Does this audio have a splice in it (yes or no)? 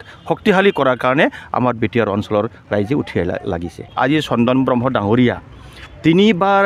yes